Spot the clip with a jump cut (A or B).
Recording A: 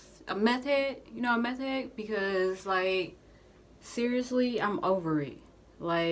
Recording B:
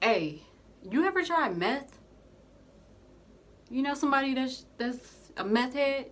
B